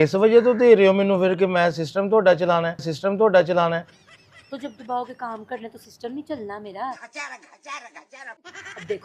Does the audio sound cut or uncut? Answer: uncut